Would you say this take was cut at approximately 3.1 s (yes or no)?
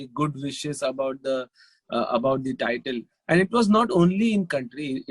no